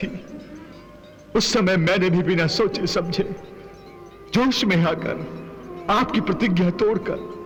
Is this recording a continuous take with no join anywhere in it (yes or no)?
yes